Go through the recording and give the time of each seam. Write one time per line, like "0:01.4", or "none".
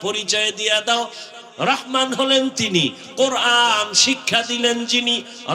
0:01.2